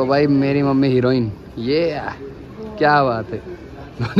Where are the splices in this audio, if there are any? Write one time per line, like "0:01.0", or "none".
none

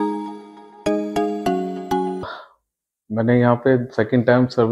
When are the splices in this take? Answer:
0:02.3

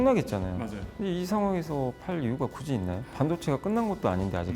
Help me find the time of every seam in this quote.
0:03.1

